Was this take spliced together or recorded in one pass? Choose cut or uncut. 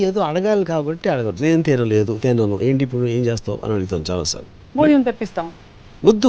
uncut